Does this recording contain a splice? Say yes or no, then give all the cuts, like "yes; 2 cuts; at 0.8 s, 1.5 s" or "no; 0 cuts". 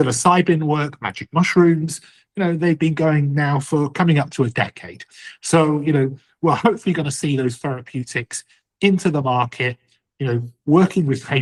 no; 0 cuts